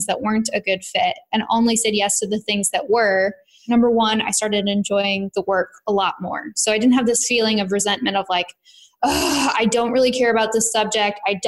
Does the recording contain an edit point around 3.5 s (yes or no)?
yes